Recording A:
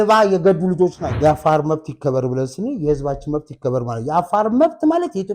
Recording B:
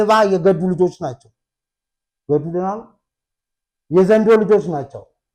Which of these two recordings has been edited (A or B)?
A